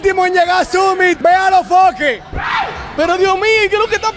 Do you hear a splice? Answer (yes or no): yes